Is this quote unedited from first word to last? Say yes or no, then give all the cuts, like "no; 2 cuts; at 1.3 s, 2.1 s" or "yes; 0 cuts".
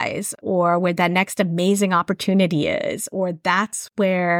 yes; 0 cuts